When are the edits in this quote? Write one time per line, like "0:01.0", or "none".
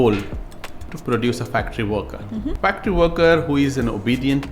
0:00.9
0:02.6